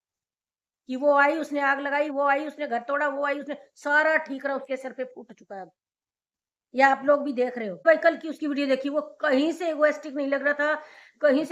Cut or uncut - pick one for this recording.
cut